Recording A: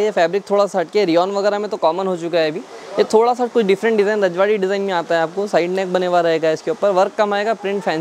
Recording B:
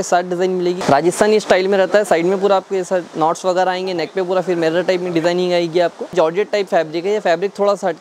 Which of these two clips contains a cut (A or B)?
B